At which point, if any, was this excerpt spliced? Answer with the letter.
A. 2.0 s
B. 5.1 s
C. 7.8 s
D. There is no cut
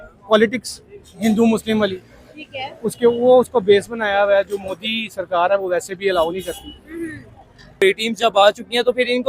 C